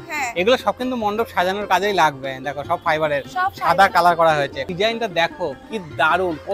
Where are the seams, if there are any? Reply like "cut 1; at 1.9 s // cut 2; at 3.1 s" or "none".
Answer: cut 1; at 4.6 s